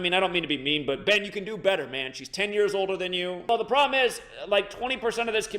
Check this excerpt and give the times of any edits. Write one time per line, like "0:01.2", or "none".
0:03.5